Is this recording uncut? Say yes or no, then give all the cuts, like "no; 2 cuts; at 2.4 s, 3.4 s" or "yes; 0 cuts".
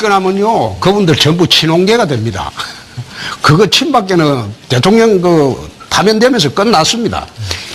yes; 0 cuts